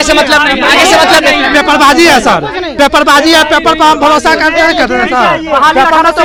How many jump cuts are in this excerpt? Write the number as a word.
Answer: zero